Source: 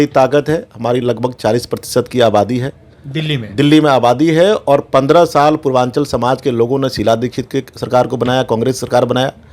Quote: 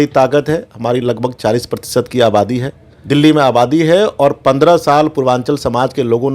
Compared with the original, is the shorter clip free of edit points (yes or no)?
no